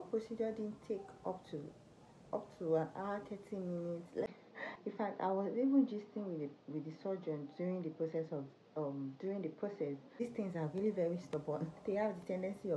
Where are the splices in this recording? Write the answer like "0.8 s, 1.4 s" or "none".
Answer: 4.4 s, 10.2 s